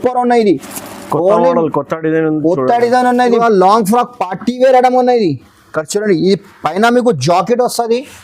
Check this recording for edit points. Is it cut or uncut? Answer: cut